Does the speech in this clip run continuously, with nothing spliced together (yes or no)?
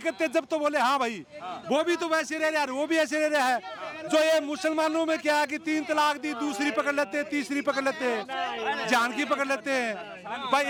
yes